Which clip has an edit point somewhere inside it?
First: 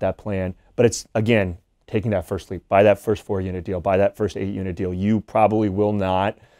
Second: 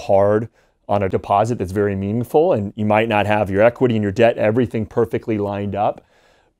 second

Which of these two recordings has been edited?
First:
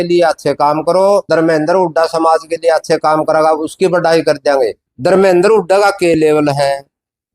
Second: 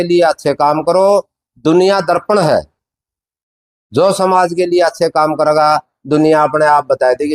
first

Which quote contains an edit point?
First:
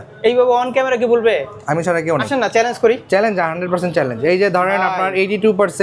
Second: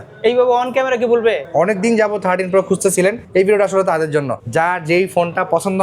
second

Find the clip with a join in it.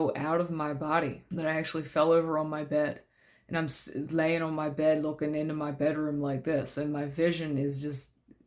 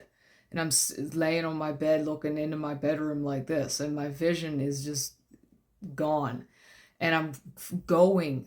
first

